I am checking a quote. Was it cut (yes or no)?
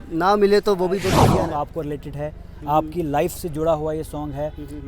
yes